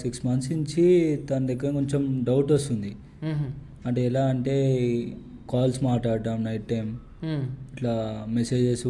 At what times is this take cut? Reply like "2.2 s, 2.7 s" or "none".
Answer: none